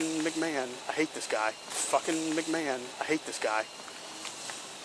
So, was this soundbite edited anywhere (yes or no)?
no